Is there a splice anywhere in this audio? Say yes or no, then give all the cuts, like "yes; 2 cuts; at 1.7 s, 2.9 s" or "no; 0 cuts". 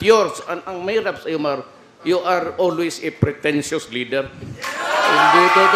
no; 0 cuts